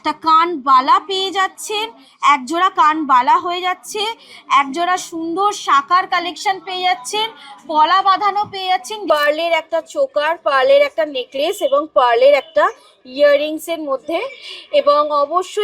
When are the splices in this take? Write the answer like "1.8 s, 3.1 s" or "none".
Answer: 8.9 s